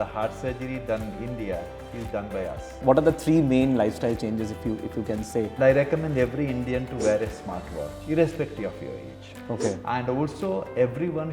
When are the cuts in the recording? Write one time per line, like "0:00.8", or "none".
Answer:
0:02.8
0:05.5
0:09.3